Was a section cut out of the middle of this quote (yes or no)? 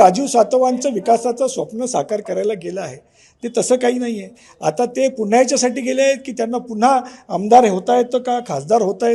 no